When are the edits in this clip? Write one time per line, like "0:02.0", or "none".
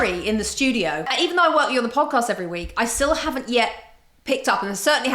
0:01.1